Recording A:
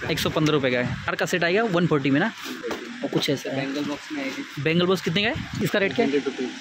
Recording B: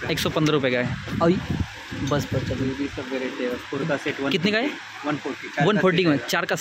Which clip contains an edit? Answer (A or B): A